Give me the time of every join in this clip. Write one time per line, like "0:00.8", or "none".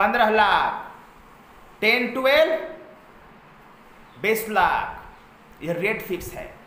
none